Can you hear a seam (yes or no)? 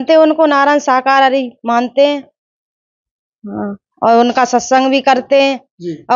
no